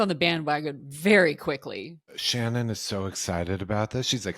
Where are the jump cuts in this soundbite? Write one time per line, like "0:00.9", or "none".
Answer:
0:02.2